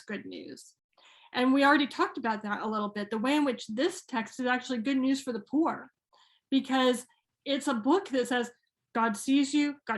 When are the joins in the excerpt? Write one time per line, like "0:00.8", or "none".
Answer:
none